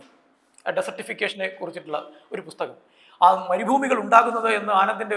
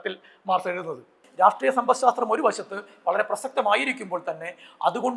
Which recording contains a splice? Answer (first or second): second